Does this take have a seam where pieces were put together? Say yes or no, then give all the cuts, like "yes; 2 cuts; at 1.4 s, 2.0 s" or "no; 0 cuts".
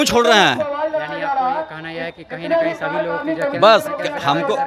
no; 0 cuts